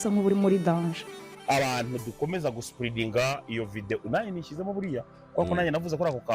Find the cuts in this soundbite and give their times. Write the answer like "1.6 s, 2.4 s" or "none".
1.0 s